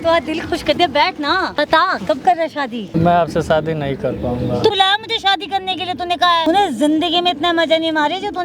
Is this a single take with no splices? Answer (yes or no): no